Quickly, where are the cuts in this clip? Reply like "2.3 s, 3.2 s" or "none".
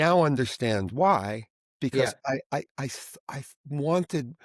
none